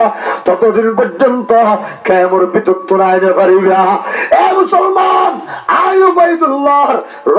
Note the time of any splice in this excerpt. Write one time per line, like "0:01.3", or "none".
none